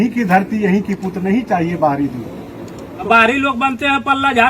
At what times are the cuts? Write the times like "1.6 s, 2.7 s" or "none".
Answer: 3.0 s